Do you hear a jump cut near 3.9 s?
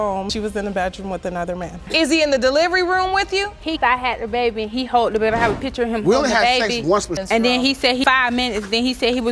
no; 1 cut; at 1.8 s

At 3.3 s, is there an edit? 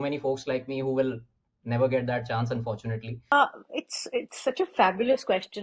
yes; 1 cut; at 3.3 s

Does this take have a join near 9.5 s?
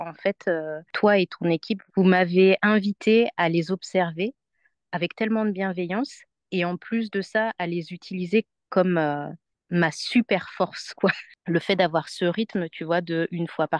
no; 1 cut; at 11.3 s

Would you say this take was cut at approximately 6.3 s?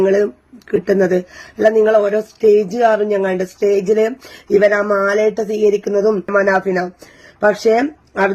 yes; 1 cut; at 6.3 s

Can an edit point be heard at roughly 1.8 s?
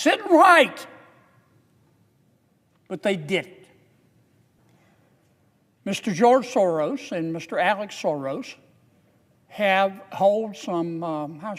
no; 1 cut; at 4.6 s

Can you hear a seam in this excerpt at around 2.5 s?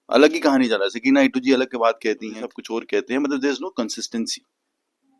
yes; 1 cut; at 2.5 s

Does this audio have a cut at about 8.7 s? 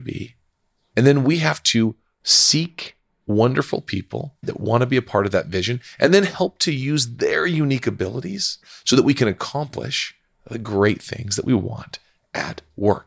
yes; 1 cut; at 8.7 s

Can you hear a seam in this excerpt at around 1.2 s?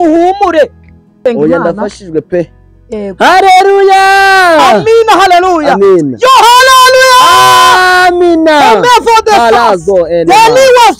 yes; 1 cut; at 1.2 s

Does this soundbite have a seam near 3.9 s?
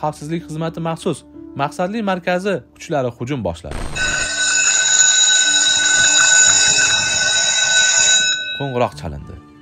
yes; 1 cut; at 3.9 s

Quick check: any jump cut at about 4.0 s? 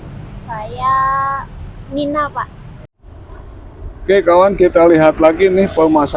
no; 1 cut; at 2.6 s

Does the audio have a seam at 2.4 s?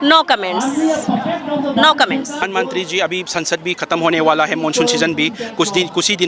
yes; 1 cut; at 2.4 s

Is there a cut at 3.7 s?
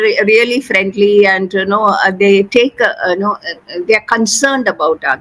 no; 0 cuts

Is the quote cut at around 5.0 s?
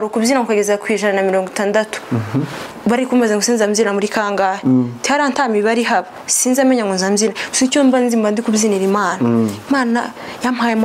no; 0 cuts

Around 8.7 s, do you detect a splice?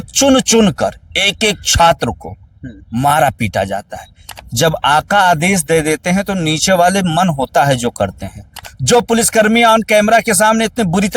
yes; 2 cuts; at 4.3 s, 8.7 s

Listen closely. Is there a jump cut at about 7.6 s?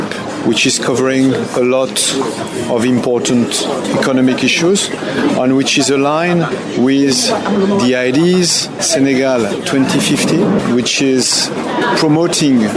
no; 2 cuts; at 8.8 s, 11.6 s

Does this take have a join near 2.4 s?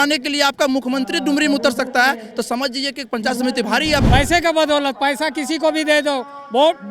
no; 1 cut; at 4.0 s

